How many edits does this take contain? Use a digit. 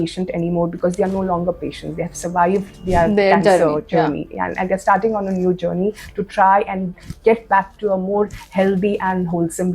0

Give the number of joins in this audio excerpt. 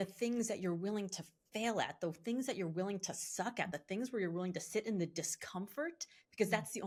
0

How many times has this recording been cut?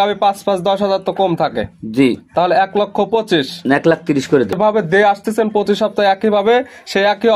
0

